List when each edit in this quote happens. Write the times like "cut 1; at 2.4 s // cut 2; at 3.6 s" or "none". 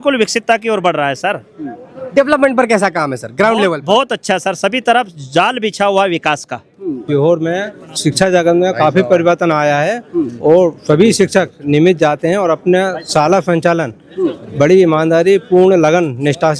cut 1; at 7.0 s